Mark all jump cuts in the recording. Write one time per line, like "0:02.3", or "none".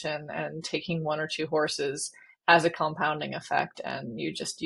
none